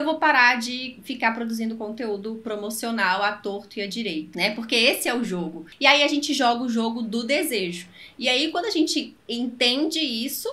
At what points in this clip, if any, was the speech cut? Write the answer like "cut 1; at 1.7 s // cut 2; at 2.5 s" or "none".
cut 1; at 4.3 s // cut 2; at 5.6 s